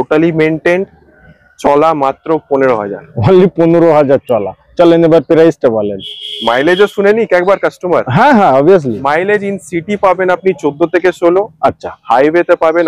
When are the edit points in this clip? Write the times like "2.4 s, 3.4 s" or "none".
none